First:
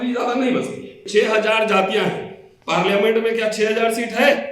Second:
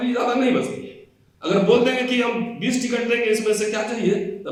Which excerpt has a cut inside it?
first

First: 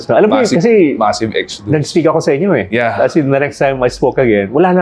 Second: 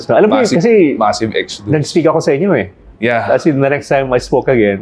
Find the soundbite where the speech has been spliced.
first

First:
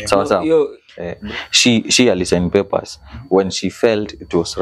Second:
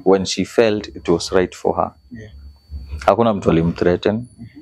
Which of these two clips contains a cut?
first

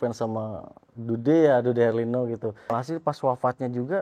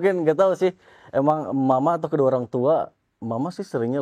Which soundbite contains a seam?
first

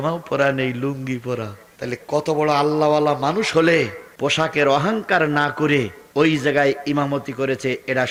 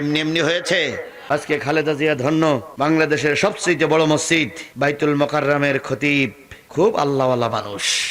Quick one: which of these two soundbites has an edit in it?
second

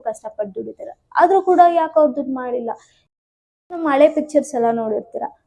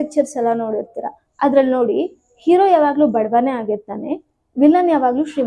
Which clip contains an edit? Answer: first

